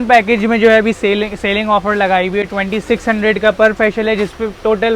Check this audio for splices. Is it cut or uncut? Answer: uncut